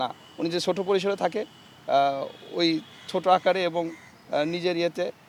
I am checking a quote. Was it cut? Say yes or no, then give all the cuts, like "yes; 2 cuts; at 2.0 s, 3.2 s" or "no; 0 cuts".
no; 0 cuts